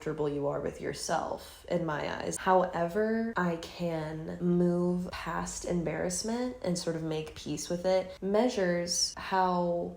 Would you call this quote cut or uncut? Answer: uncut